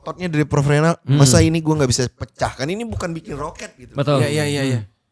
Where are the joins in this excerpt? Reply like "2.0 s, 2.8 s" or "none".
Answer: none